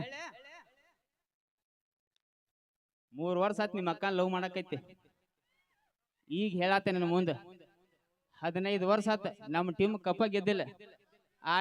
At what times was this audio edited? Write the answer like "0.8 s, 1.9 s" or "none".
none